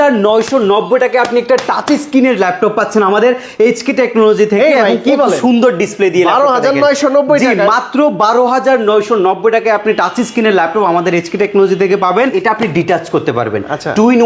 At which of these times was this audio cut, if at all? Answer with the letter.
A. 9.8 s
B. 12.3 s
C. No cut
B